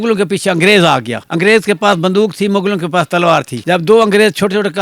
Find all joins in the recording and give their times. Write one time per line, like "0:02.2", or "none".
0:01.2